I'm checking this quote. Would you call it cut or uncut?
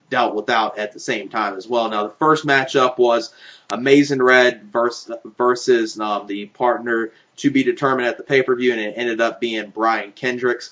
uncut